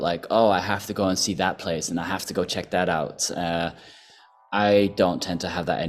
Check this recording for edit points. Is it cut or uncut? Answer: uncut